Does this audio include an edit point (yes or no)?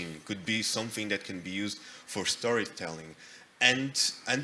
no